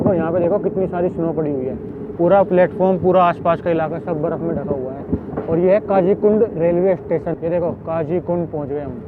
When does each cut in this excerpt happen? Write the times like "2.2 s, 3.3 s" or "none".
7.3 s